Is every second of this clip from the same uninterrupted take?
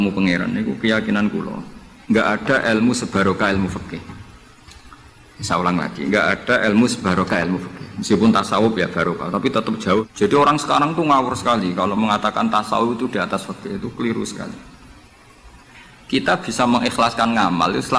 no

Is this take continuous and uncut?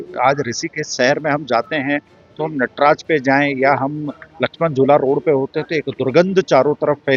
yes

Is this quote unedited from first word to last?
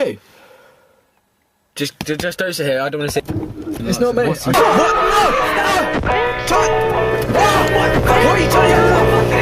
no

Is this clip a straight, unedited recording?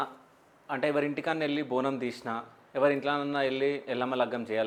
yes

